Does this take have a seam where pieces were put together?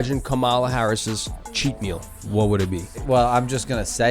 yes; 2 cuts; at 2.1 s, 3.0 s

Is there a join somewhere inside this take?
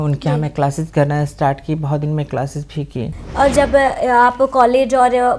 yes; 1 cut; at 3.2 s

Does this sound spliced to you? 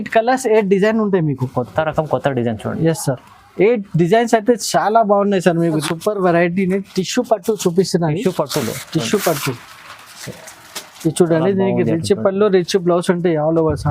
yes; 1 cut; at 5.8 s

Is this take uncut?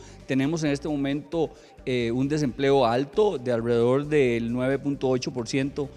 yes; 0 cuts

